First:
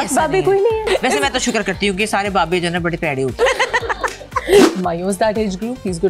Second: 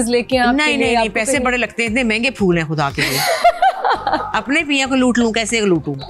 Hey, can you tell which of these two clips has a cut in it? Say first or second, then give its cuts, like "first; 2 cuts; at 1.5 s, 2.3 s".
first; 3 cuts; at 0.8 s, 3.4 s, 4.7 s